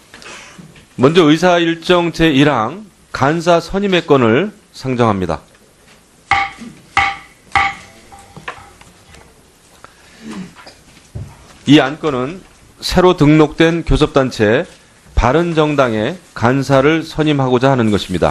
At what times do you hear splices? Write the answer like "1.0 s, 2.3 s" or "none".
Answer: 12.3 s